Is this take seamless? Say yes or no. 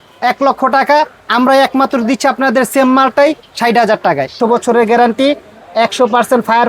no